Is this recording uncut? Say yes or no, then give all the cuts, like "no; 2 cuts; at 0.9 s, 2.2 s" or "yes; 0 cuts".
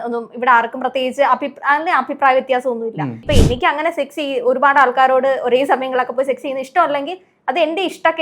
no; 1 cut; at 3.2 s